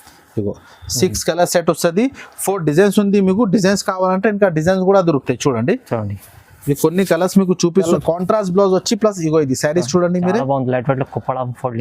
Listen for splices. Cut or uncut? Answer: cut